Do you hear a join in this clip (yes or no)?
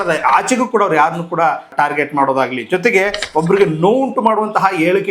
yes